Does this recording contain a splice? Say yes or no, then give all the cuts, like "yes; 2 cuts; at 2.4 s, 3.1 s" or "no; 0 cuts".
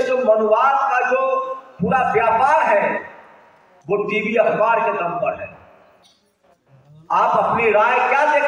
no; 0 cuts